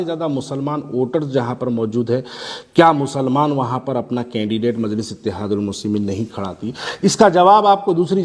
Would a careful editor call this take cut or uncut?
uncut